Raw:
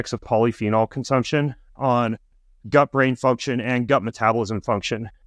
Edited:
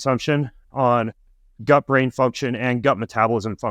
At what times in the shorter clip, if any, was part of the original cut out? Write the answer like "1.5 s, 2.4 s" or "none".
none